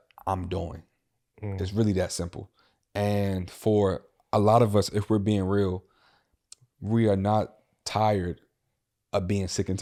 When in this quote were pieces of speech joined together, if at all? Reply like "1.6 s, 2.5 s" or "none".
none

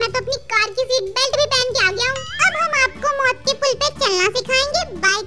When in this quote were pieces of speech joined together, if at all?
none

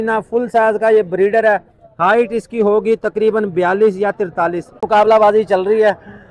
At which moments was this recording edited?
4.8 s

